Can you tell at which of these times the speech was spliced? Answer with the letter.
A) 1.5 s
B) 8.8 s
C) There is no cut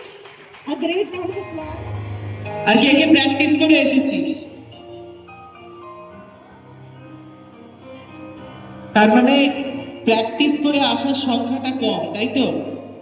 A